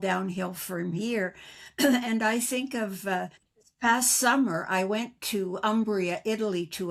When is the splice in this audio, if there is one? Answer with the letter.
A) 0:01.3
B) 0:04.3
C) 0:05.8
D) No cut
D